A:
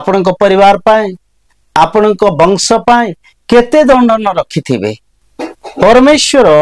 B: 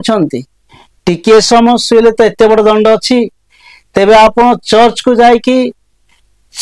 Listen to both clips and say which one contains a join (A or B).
A